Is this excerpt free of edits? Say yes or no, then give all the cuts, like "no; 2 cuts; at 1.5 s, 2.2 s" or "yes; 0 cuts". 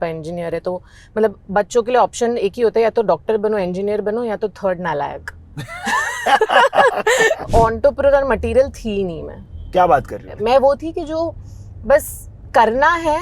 no; 2 cuts; at 7.5 s, 10.2 s